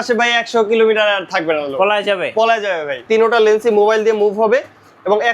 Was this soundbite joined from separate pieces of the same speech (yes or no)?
yes